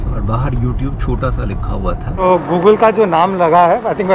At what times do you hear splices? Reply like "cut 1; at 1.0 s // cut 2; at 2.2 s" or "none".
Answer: cut 1; at 2.1 s